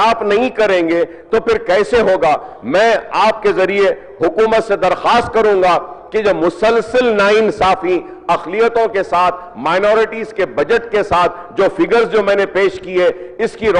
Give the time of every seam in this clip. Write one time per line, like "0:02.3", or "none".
none